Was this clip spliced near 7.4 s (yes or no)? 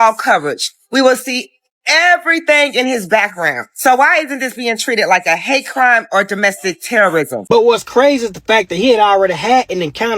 yes